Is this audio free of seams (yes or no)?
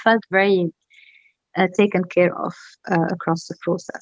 yes